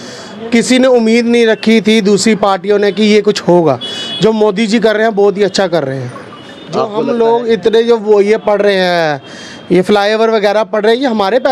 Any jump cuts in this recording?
yes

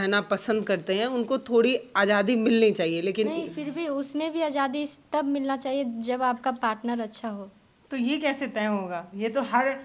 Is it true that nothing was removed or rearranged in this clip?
yes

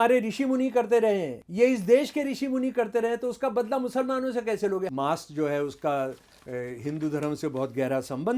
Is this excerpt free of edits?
no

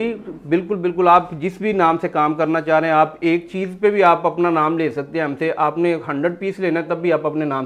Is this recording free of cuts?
yes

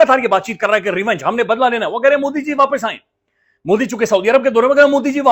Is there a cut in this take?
no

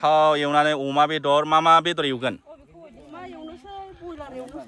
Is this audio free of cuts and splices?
yes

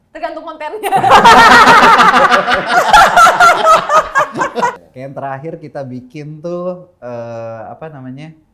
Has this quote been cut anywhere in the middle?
yes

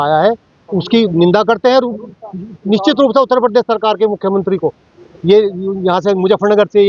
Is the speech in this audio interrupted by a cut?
no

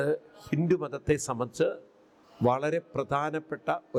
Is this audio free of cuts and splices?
yes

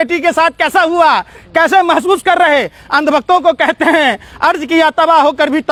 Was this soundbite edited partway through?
no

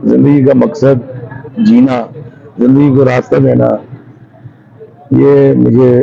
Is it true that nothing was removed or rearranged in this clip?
yes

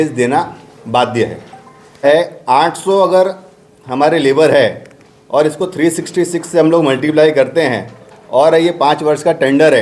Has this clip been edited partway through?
yes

